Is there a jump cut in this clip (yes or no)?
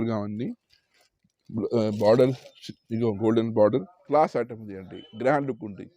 yes